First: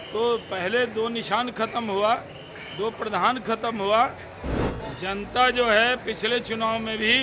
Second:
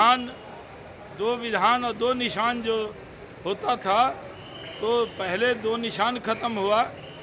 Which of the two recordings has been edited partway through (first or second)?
first